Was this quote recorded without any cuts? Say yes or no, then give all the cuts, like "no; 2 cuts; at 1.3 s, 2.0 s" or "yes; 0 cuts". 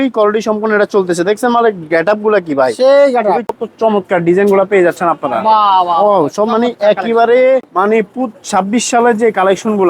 no; 2 cuts; at 3.5 s, 7.7 s